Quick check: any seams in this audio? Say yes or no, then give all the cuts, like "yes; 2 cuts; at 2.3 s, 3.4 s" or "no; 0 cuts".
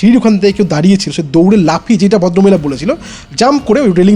no; 0 cuts